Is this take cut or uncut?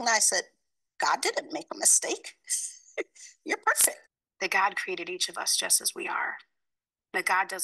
cut